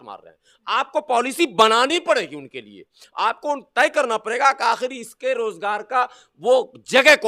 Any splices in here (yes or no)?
no